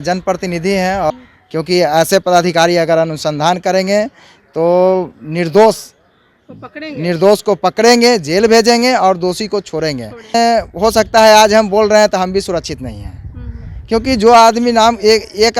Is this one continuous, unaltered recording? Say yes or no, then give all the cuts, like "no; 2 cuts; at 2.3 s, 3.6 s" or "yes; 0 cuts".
no; 2 cuts; at 1.1 s, 10.3 s